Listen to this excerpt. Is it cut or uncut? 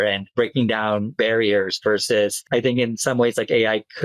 cut